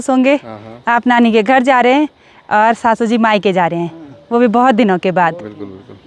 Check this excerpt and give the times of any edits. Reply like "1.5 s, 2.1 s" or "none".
none